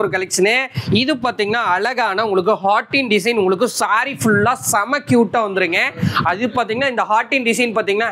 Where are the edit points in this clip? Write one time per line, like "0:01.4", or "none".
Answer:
none